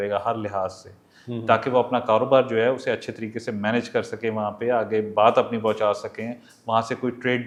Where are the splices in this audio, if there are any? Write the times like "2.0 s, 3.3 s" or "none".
none